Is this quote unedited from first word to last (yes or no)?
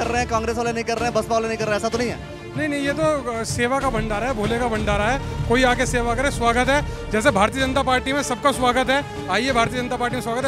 yes